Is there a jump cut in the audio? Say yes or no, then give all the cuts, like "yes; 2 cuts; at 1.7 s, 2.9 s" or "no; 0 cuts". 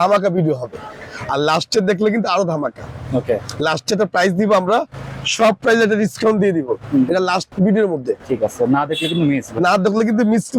no; 0 cuts